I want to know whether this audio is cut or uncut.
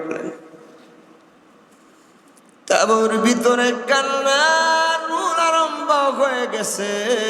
uncut